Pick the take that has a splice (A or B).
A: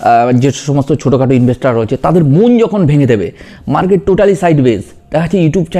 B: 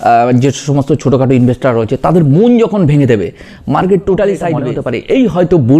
B